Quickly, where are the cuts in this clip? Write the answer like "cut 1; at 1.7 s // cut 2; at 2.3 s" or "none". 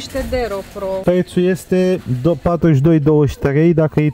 cut 1; at 1.0 s